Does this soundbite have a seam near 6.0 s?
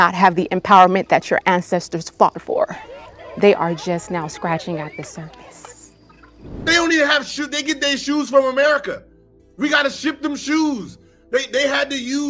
yes; 1 cut; at 6.0 s

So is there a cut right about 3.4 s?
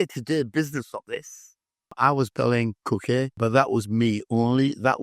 yes; 2 cuts; at 1.9 s, 3.4 s

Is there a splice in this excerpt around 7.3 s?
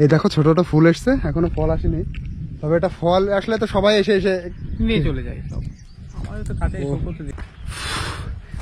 yes; 1 cut; at 7.3 s

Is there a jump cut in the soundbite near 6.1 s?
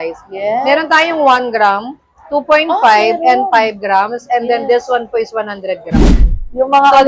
yes; 1 cut; at 6.1 s

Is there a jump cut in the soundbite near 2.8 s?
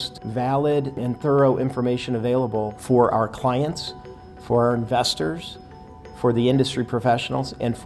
yes; 1 cut; at 2.8 s

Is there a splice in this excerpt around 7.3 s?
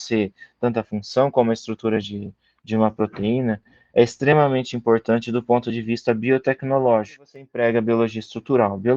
yes; 1 cut; at 7.3 s

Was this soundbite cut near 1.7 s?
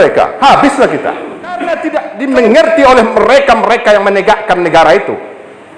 yes; 1 cut; at 1.7 s

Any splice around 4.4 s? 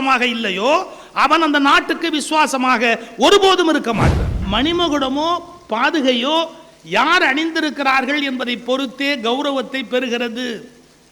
yes; 1 cut; at 4.4 s

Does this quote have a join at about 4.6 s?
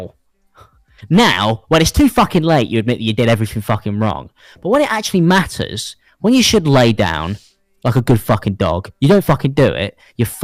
no; 0 cuts

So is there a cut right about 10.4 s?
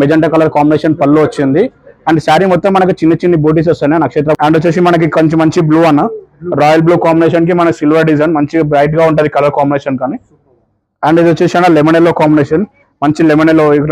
no; 1 cut; at 4.4 s

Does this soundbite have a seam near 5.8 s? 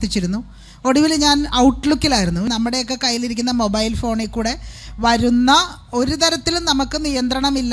no; 1 cut; at 2.5 s

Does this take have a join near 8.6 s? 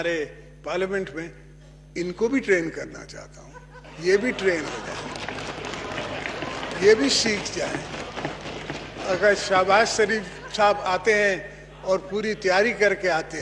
no; 0 cuts

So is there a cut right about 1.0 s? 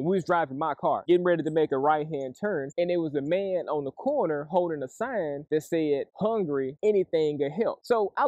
yes; 1 cut; at 1.0 s

